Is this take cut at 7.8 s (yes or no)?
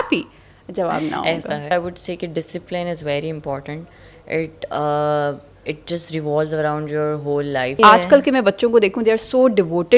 yes